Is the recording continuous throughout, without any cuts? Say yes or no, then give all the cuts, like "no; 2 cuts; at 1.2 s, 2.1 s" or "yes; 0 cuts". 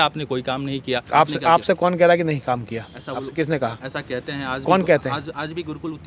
yes; 0 cuts